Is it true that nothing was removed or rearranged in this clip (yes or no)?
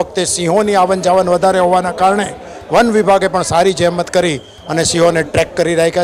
yes